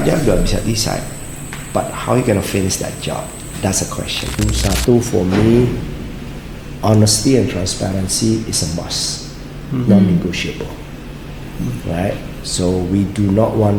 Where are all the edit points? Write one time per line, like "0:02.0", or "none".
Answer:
0:04.4